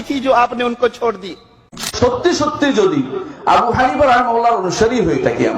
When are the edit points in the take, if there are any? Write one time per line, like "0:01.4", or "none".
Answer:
0:01.9